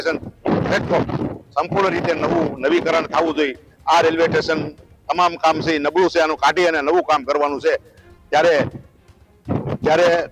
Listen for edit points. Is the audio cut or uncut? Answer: uncut